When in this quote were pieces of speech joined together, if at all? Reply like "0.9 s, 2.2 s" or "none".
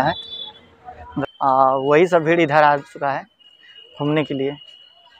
1.0 s